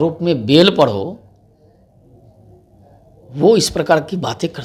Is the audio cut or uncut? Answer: uncut